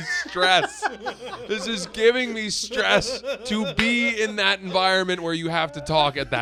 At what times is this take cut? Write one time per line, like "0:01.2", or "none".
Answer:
none